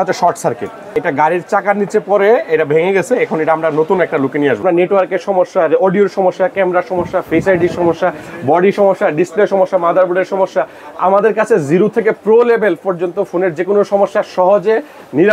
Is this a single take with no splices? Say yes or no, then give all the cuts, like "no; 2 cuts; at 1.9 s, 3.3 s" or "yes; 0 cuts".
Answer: no; 2 cuts; at 0.9 s, 4.6 s